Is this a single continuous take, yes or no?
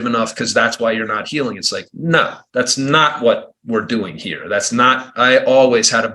no